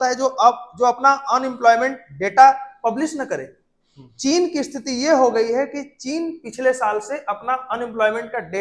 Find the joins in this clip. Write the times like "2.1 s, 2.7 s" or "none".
none